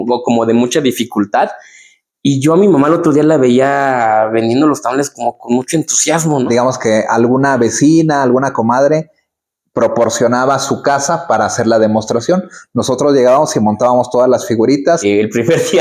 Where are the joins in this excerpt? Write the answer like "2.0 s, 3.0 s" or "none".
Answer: 6.5 s, 15.0 s

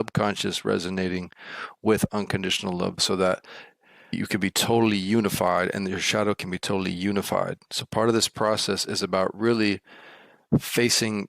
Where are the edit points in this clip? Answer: 3.0 s

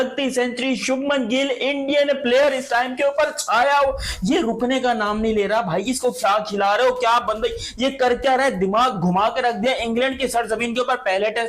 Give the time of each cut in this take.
none

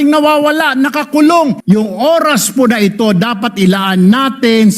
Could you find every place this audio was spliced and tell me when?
1.6 s

